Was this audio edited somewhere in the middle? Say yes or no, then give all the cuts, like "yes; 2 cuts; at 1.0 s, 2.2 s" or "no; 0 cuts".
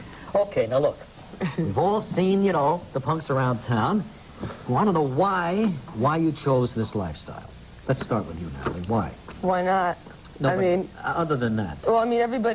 no; 0 cuts